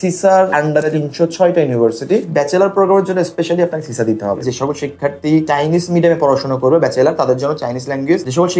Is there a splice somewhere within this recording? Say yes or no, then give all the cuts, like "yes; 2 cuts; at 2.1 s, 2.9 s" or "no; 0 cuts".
yes; 3 cuts; at 0.9 s, 2.3 s, 4.4 s